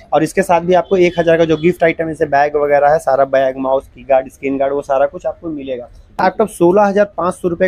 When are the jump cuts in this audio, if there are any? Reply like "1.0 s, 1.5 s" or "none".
6.2 s